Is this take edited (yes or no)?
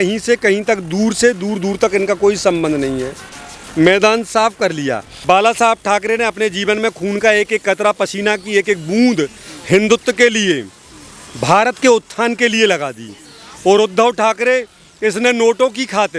yes